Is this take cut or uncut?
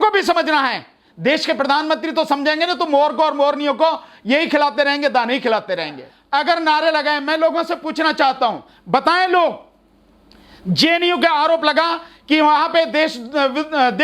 cut